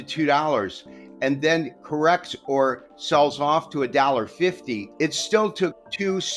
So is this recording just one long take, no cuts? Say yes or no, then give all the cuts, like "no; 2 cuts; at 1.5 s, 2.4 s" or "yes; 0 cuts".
no; 1 cut; at 4.9 s